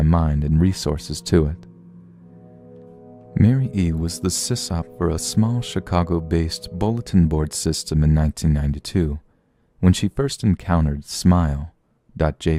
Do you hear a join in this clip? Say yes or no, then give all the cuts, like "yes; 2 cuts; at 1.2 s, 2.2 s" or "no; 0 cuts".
no; 0 cuts